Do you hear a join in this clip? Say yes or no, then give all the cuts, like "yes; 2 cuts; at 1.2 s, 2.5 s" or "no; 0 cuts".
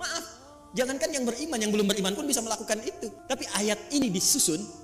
yes; 1 cut; at 3.1 s